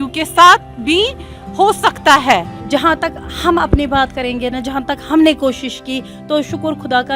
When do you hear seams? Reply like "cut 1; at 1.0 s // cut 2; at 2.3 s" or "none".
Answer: cut 1; at 2.5 s